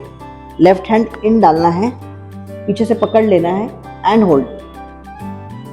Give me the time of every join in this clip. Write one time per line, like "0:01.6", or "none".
0:04.6